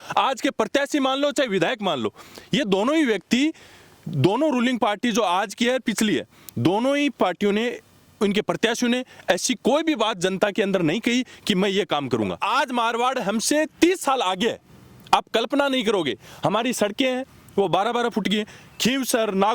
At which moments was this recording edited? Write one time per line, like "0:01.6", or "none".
0:12.4